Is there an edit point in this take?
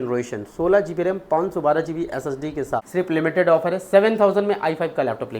yes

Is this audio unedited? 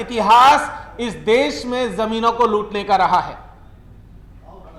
yes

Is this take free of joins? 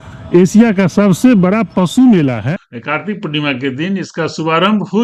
no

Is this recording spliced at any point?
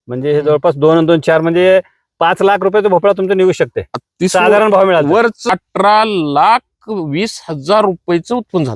yes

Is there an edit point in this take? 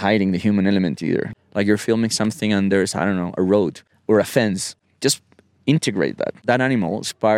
yes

